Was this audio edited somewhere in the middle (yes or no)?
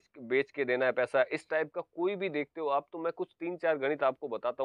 no